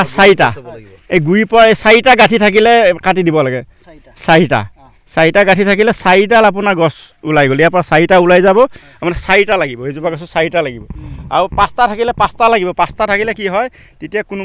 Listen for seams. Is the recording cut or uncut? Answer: uncut